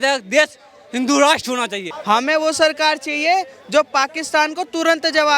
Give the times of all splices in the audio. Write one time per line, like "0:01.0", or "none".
0:01.9